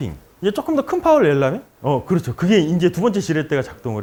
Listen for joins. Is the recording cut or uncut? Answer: uncut